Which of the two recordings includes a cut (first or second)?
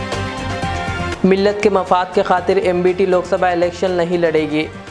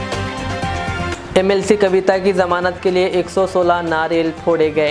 second